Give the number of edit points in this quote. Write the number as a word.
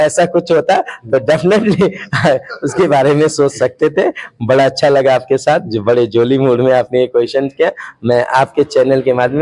zero